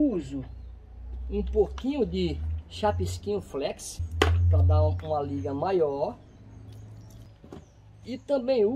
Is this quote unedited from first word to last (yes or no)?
no